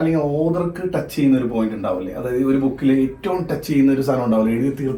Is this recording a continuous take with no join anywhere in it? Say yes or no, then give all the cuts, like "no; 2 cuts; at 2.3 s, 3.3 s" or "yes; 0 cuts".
yes; 0 cuts